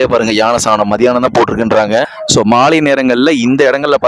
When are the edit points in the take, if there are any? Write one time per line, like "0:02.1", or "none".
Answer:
0:02.2